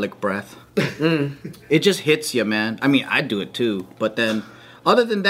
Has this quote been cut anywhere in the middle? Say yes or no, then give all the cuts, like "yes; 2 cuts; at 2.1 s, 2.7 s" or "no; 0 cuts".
yes; 1 cut; at 1.5 s